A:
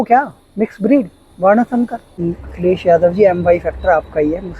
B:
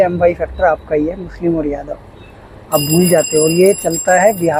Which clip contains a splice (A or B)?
A